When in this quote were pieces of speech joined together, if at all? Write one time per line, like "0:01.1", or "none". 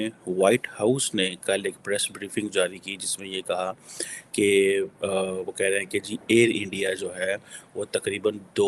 none